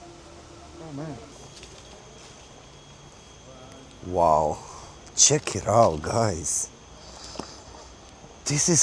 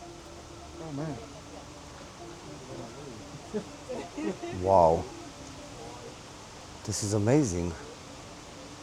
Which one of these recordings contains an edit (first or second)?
first